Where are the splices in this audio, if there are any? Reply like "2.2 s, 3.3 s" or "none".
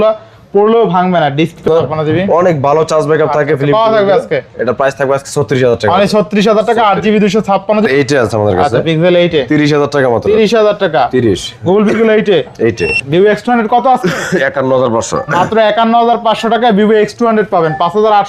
1.6 s, 7.9 s, 13.0 s